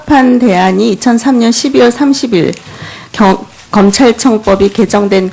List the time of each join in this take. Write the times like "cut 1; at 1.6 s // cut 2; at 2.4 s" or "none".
none